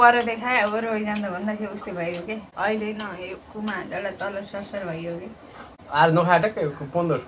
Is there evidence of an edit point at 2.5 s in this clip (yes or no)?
yes